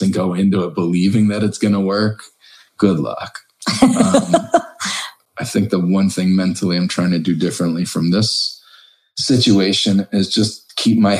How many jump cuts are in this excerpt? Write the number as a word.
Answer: one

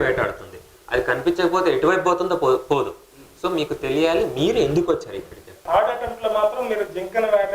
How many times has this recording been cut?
one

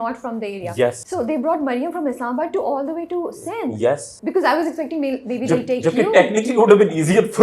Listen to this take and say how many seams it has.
two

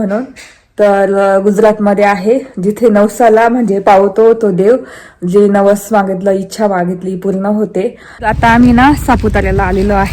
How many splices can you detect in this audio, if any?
one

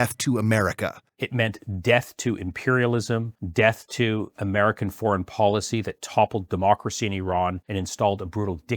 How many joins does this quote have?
two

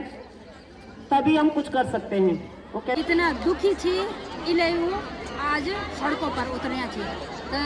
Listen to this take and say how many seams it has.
one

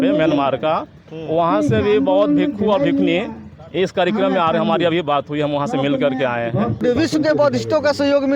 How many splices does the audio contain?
one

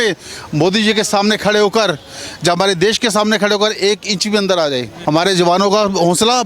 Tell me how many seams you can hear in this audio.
one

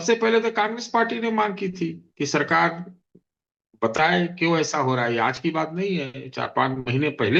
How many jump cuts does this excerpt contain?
zero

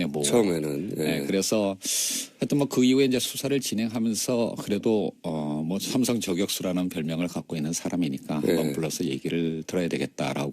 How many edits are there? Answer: one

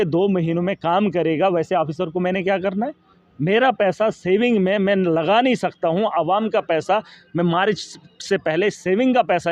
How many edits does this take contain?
zero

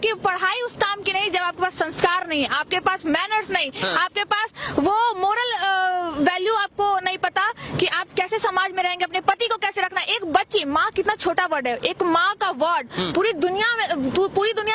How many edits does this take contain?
zero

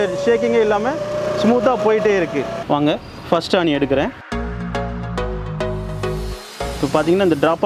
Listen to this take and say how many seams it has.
one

